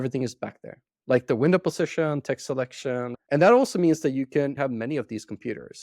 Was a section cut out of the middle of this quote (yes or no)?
yes